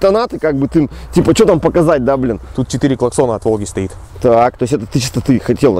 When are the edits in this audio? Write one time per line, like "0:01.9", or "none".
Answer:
0:02.5